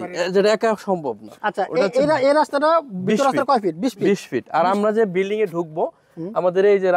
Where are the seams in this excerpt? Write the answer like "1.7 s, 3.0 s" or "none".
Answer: 1.3 s